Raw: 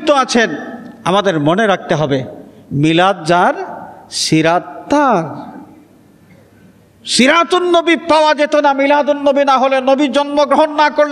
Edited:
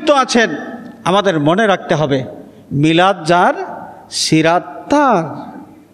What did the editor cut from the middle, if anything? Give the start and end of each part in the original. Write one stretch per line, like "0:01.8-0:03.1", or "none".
none

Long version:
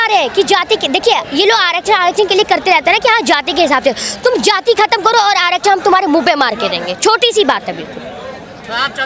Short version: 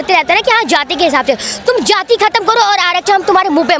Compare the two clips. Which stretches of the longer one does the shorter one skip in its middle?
none

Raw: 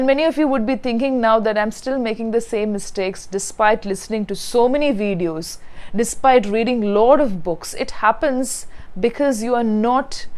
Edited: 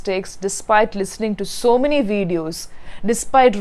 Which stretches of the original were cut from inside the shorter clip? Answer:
none

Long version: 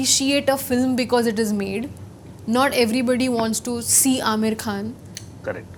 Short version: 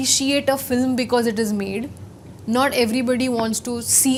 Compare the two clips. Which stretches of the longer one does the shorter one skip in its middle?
none

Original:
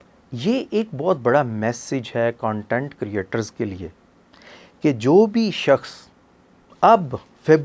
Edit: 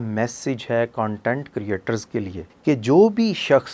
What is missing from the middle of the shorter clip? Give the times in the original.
0:03.9-0:04.6

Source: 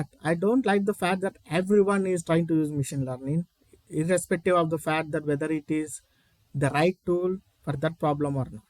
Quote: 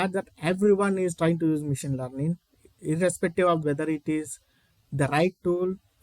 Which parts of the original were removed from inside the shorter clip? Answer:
0:04.7-0:05.2

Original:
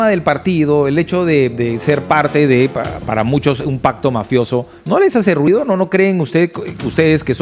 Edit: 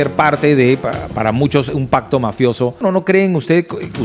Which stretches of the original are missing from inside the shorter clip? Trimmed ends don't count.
0:04.7-0:05.6

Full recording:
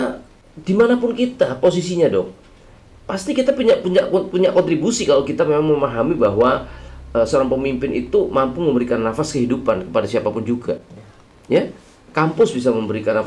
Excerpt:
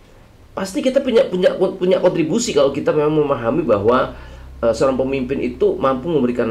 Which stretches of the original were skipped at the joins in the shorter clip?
none

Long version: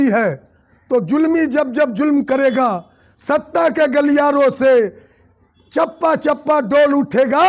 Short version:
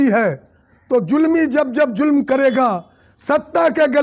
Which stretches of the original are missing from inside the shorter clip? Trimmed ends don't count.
none

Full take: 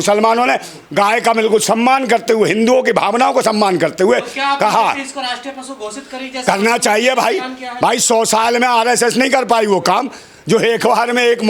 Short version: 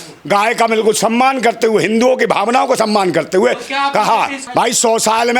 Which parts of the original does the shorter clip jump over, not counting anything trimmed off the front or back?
0:05.1-0:07.7

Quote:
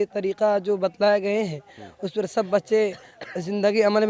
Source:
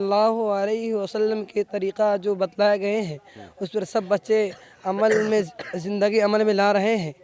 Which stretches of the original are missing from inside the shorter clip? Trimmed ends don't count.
0:04.7-0:05.5

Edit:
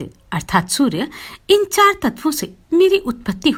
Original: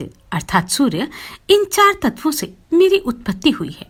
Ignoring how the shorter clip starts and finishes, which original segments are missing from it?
none

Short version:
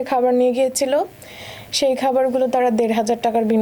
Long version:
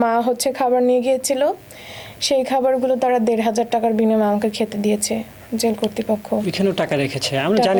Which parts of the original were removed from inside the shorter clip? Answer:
none

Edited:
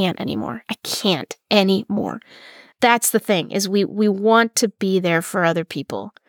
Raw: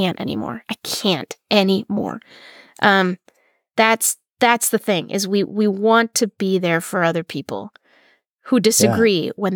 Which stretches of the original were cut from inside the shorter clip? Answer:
0:02.6-0:04.2

